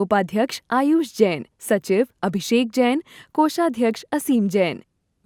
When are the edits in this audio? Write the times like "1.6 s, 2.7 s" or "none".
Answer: none